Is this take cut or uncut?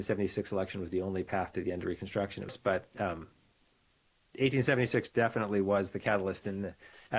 cut